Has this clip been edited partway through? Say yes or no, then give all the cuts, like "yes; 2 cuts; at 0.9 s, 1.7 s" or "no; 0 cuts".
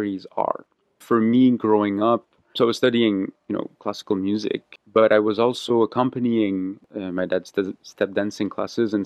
yes; 4 cuts; at 1.0 s, 2.5 s, 4.7 s, 6.8 s